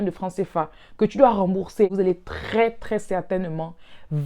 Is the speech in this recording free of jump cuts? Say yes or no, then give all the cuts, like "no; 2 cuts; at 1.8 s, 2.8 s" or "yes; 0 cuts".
no; 1 cut; at 1.9 s